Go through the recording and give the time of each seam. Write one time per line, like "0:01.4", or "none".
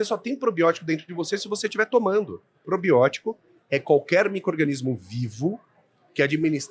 0:02.6